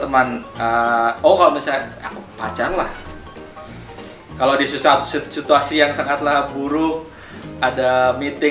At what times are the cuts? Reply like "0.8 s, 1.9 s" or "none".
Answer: none

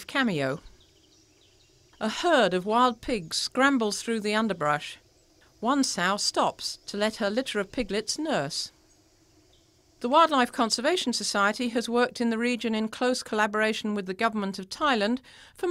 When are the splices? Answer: none

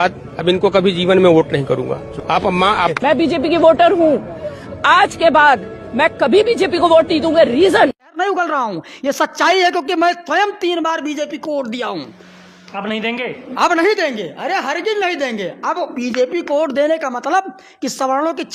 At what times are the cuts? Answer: 8.1 s

